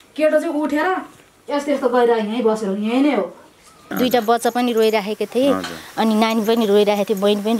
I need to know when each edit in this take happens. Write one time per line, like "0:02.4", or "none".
0:03.9

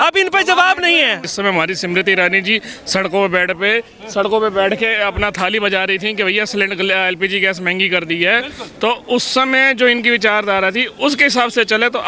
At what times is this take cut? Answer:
0:01.2

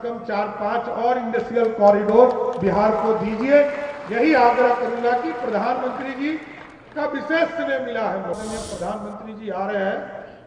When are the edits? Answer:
0:08.3

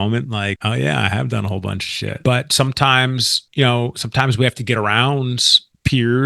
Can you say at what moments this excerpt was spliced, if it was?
0:02.1

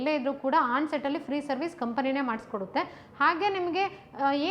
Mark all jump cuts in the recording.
none

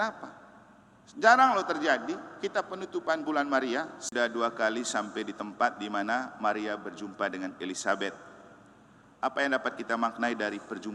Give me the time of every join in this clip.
0:04.0

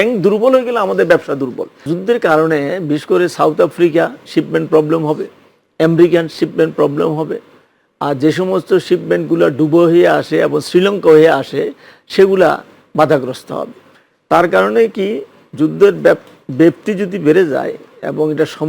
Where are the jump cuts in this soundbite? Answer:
0:01.8

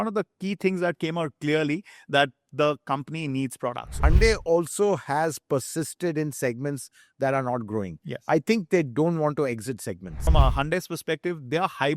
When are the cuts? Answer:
0:04.0
0:10.2

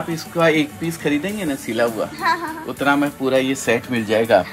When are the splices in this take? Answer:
none

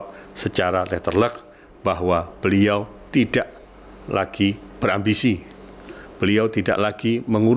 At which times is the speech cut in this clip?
0:04.7

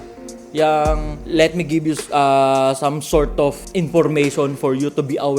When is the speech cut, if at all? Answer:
0:01.1
0:03.6

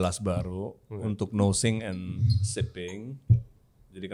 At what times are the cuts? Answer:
none

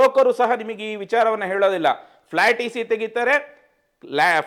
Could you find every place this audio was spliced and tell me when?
none

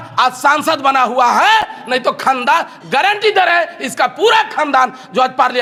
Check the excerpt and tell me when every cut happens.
none

